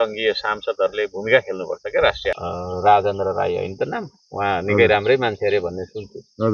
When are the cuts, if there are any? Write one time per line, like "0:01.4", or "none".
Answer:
0:02.4